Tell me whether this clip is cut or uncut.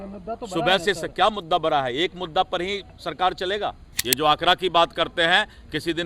cut